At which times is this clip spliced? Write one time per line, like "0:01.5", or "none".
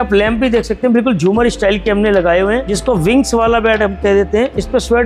0:02.7